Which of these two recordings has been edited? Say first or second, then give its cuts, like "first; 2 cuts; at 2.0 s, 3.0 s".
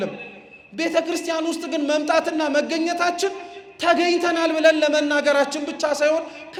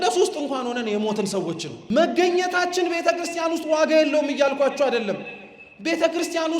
second; 1 cut; at 1.7 s